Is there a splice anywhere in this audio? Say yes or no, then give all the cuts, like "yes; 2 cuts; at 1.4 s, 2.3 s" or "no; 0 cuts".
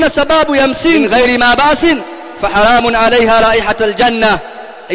yes; 1 cut; at 1.1 s